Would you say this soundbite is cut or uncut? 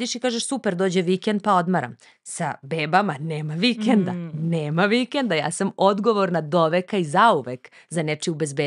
uncut